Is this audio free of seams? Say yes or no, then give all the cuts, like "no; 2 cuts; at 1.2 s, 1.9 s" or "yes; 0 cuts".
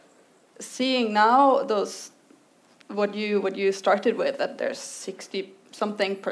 yes; 0 cuts